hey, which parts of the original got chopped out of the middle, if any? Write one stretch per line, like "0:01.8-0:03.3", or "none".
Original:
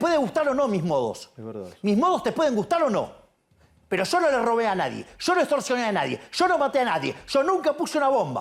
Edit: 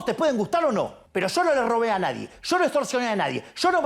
0:03.2-0:03.8